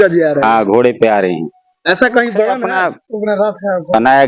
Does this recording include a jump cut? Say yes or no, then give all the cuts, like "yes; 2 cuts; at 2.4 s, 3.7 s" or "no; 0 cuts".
yes; 1 cut; at 2.6 s